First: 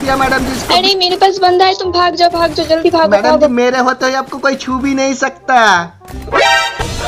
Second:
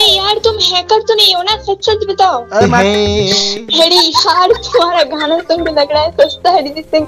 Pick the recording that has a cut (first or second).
second